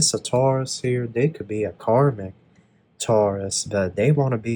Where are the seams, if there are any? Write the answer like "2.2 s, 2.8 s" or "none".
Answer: none